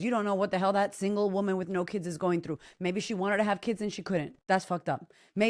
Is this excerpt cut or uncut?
cut